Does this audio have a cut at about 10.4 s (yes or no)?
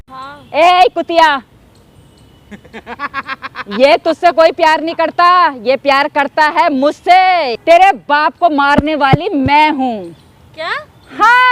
no